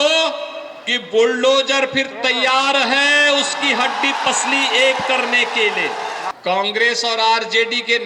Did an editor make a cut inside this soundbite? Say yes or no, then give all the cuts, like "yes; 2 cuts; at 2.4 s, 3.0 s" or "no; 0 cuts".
yes; 1 cut; at 6.3 s